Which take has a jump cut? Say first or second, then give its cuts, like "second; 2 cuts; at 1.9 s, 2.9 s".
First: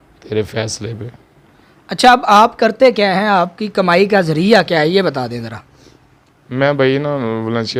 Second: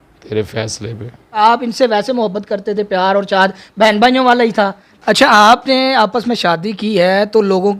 second; 2 cuts; at 1.4 s, 4.9 s